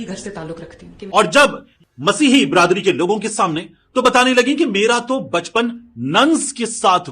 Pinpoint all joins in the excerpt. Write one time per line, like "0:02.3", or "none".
0:00.9
0:01.7